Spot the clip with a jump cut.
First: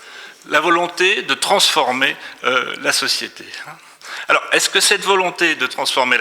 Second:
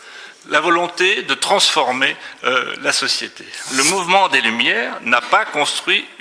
second; 1 cut; at 3.6 s

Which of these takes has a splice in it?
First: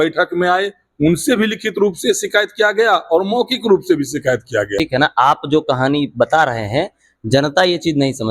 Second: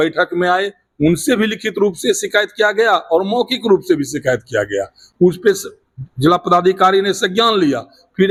first; 1 cut; at 4.7 s

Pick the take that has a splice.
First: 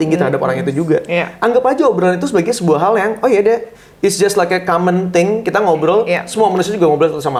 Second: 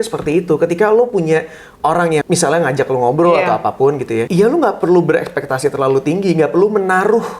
second; 2 cuts; at 2.2 s, 4.3 s

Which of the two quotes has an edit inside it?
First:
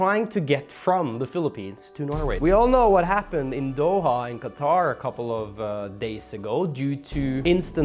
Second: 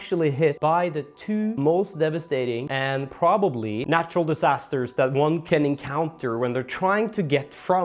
first; 1 cut; at 2.3 s

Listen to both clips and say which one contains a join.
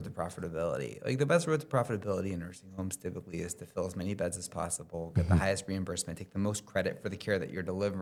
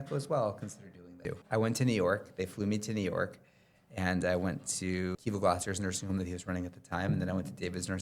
second; 2 cuts; at 1.4 s, 5.2 s

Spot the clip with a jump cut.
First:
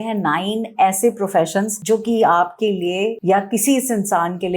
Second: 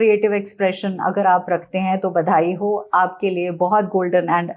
first; 2 cuts; at 1.8 s, 3.2 s

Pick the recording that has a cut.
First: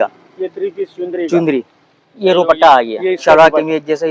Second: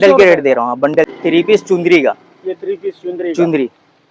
second; 1 cut; at 1.1 s

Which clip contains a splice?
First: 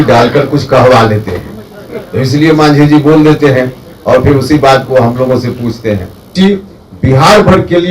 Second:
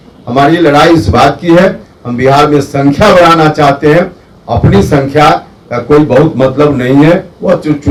first; 1 cut; at 6.2 s

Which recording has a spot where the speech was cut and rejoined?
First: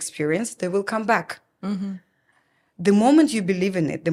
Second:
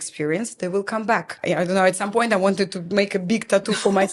second; 1 cut; at 1.3 s

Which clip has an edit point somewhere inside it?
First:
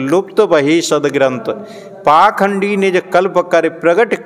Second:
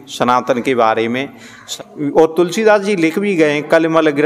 second; 1 cut; at 1.6 s

